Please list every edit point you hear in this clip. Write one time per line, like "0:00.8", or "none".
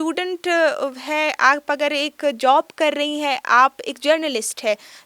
none